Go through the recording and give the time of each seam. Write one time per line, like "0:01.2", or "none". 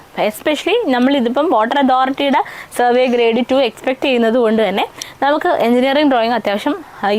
none